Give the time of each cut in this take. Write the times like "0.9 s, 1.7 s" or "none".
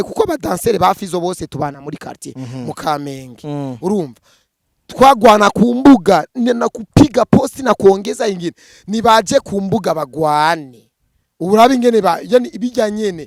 none